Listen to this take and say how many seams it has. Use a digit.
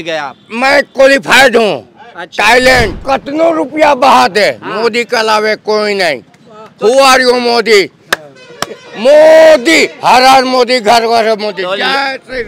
1